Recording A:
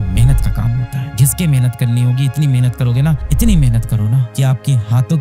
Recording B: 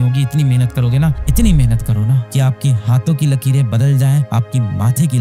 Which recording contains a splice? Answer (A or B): A